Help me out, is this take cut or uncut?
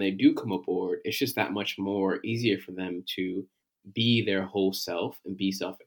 uncut